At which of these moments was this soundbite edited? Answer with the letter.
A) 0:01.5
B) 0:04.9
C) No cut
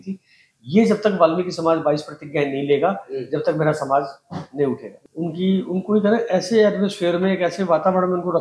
B